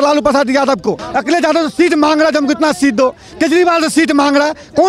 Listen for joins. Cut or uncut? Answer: cut